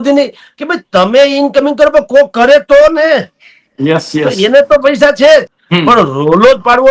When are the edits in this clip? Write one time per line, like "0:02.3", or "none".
0:05.6